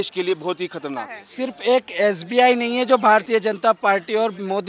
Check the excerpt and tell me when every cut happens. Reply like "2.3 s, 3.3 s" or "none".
1.1 s, 3.3 s